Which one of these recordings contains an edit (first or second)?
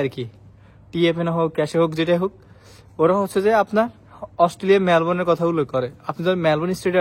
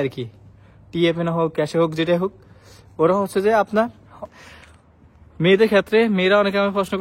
second